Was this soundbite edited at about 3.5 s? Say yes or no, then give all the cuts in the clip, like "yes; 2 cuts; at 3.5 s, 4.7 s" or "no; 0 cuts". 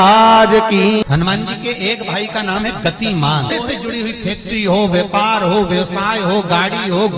yes; 2 cuts; at 1.0 s, 3.5 s